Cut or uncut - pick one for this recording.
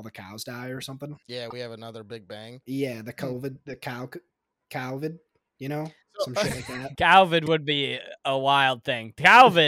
cut